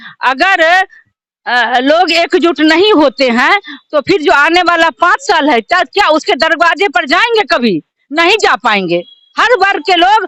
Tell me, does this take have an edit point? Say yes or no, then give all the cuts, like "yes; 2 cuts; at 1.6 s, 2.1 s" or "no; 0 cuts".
no; 0 cuts